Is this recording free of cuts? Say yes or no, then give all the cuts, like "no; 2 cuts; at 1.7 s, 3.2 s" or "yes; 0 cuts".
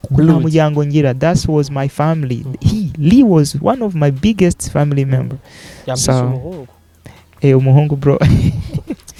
yes; 0 cuts